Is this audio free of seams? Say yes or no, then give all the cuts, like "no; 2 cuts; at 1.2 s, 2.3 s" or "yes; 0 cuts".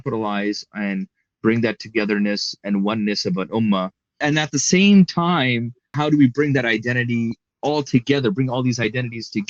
no; 3 cuts; at 4.2 s, 5.9 s, 7.5 s